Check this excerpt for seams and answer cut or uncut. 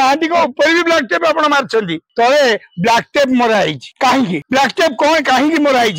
cut